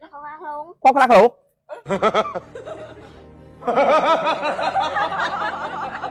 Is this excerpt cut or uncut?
uncut